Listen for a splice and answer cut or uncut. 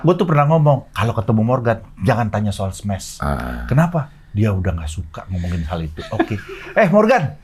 uncut